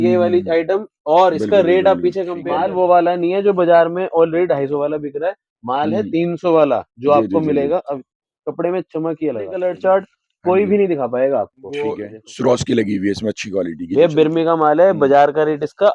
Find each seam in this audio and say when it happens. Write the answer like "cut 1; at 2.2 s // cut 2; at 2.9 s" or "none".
cut 1; at 2.4 s // cut 2; at 9.6 s // cut 3; at 12.0 s